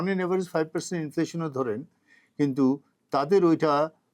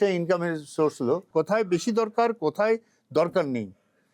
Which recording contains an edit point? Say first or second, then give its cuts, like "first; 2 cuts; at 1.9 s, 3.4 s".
second; 1 cut; at 1.3 s